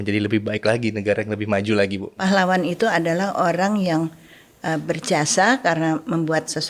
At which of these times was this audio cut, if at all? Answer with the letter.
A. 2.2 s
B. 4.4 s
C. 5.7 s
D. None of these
A